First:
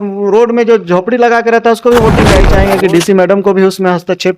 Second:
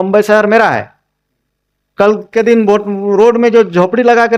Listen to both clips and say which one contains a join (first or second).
first